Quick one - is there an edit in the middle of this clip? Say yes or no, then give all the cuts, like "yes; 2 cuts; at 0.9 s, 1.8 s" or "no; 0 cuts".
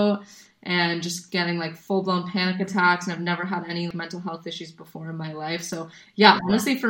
yes; 1 cut; at 3.9 s